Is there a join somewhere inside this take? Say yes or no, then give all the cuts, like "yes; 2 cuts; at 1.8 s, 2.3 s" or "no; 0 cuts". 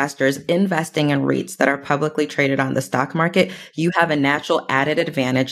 no; 0 cuts